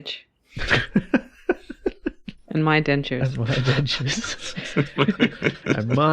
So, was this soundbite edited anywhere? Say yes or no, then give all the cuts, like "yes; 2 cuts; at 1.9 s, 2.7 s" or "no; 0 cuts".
yes; 1 cut; at 2.3 s